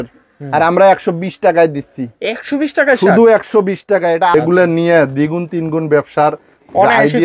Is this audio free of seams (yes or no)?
no